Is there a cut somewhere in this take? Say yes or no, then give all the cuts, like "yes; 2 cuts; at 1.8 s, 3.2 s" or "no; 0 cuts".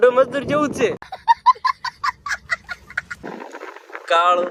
no; 0 cuts